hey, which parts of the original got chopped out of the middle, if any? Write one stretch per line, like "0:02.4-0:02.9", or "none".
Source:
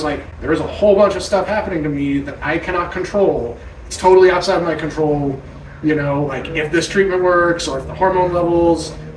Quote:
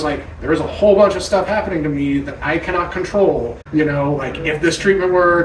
0:03.6-0:05.7